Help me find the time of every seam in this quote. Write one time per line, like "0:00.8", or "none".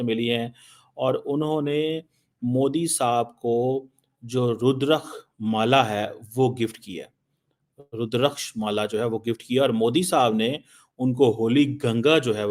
none